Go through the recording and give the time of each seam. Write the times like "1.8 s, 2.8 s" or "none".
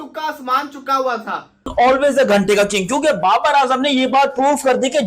1.7 s